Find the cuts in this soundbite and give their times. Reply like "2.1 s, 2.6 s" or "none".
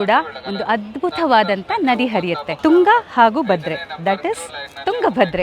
2.5 s